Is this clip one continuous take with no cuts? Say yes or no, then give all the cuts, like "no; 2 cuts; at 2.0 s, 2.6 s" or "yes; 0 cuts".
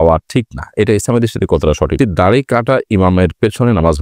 no; 1 cut; at 1.9 s